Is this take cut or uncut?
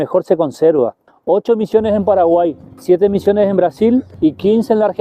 cut